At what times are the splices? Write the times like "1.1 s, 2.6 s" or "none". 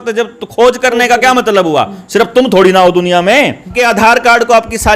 3.7 s